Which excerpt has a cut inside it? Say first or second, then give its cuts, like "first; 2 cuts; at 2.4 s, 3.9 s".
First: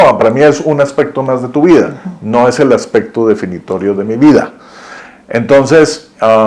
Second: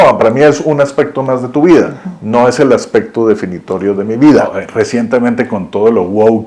second; 1 cut; at 4.6 s